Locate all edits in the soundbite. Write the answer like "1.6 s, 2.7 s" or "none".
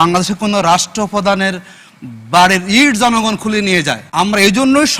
4.0 s